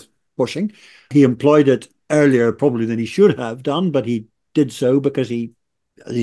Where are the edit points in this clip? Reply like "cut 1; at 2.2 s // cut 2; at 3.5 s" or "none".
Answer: cut 1; at 1.1 s